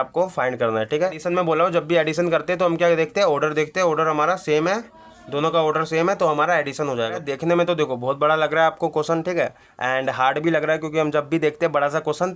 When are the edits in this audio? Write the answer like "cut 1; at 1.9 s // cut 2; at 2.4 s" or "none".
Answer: cut 1; at 1.2 s // cut 2; at 7.2 s